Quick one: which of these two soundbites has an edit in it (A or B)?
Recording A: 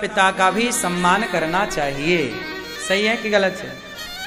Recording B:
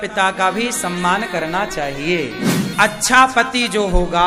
B